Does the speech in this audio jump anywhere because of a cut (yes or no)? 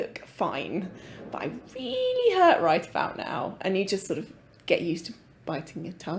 no